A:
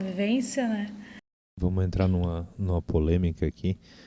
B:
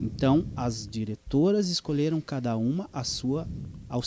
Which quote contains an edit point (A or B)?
A